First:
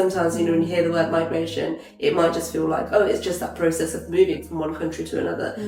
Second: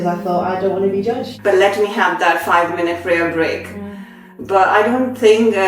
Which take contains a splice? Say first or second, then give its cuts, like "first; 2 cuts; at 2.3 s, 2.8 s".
second; 1 cut; at 1.3 s